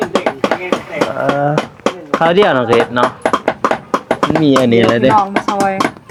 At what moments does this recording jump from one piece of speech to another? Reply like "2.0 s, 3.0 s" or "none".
none